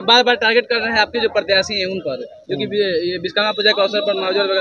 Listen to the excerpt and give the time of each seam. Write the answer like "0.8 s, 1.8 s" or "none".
none